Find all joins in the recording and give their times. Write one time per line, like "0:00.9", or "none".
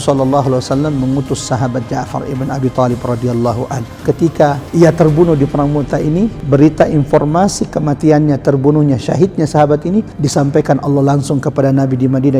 0:04.6
0:06.4
0:10.2